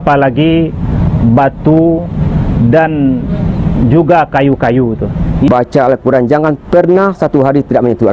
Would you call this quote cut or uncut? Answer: cut